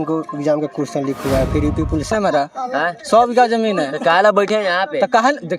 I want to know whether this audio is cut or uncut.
cut